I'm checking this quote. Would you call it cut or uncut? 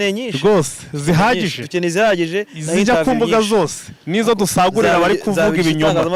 uncut